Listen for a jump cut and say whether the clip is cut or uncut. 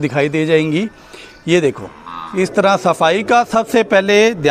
uncut